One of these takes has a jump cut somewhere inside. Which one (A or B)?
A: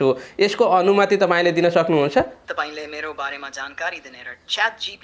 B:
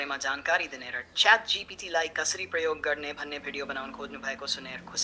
A